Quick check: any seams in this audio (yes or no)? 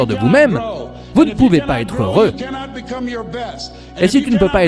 no